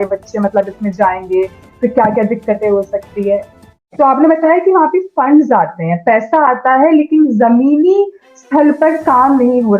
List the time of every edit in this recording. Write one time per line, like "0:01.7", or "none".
0:03.6

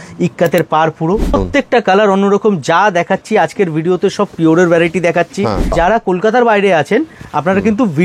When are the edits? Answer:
0:01.3
0:05.7

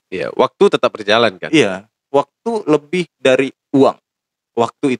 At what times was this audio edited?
none

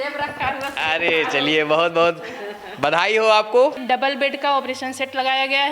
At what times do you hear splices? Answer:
0:03.8

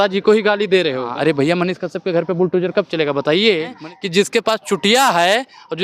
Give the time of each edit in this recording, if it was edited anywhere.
0:01.1
0:03.8

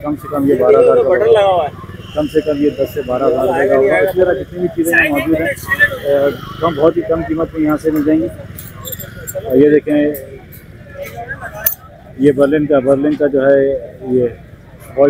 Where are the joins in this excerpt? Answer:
none

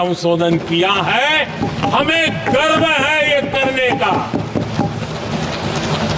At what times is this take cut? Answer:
none

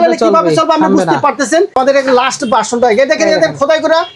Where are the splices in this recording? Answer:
0:01.8

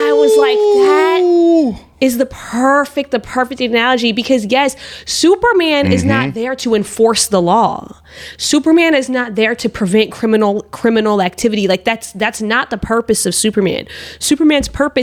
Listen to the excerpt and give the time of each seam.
none

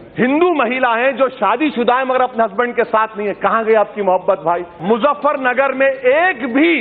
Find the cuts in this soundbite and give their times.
0:04.7

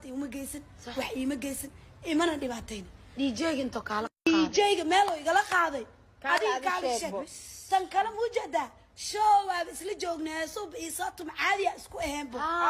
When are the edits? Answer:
0:11.5

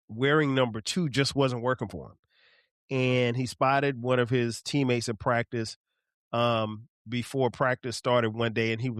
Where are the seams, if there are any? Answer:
none

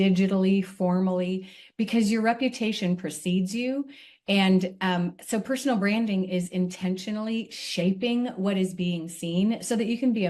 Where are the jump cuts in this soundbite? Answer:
none

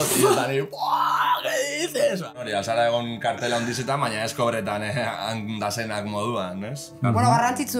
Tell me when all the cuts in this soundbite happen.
0:02.4

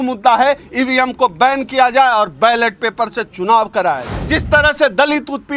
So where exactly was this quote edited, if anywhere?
0:04.1

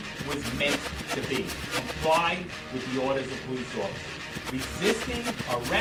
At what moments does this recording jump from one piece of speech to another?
none

